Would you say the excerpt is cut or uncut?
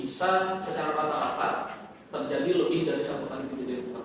uncut